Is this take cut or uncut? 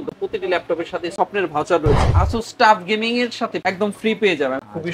cut